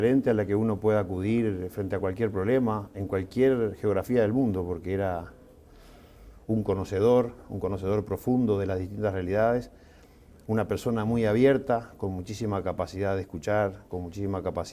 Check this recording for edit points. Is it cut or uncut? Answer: uncut